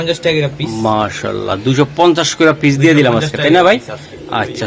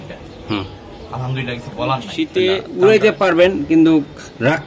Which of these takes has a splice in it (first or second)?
second